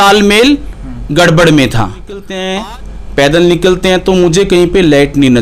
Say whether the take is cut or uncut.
cut